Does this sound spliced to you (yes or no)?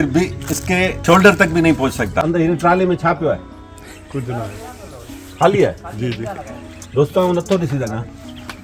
yes